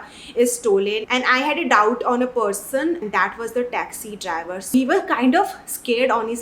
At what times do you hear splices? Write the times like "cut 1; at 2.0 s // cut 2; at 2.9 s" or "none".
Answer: cut 1; at 3.0 s // cut 2; at 4.7 s